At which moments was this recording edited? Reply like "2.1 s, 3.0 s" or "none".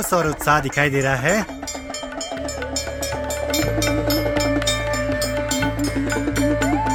none